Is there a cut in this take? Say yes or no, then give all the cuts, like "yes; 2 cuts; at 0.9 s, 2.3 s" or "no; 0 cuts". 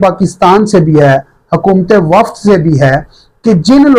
no; 0 cuts